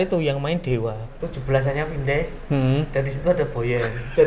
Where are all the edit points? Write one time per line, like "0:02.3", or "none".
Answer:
0:01.1